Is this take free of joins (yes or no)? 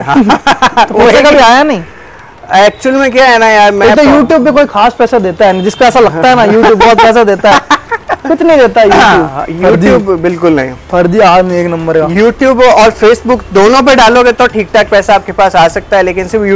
yes